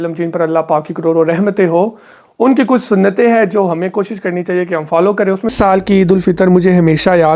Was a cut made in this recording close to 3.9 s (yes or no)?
no